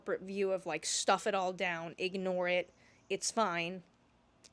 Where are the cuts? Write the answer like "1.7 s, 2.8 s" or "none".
none